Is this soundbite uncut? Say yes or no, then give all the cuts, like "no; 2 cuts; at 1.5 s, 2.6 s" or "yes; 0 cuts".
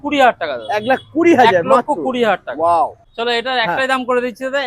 no; 1 cut; at 3.1 s